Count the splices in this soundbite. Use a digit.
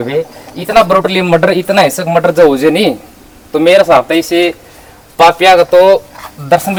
0